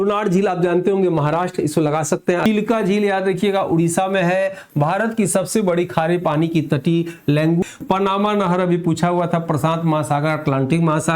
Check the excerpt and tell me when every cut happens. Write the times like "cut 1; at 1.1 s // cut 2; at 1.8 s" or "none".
cut 1; at 2.4 s // cut 2; at 7.6 s